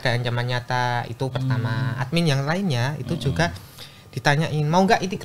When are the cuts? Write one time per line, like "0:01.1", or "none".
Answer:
none